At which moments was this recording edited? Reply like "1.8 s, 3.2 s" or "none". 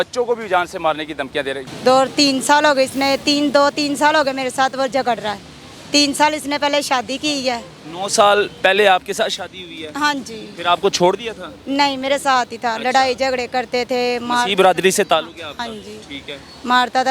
1.7 s